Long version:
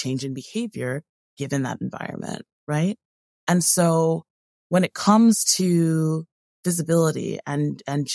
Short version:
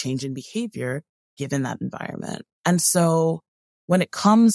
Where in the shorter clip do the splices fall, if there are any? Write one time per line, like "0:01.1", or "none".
0:02.5